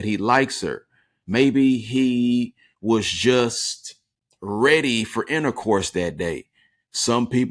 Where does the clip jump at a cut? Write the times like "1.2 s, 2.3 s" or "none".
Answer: none